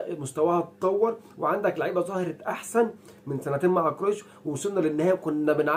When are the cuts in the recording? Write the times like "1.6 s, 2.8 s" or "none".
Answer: none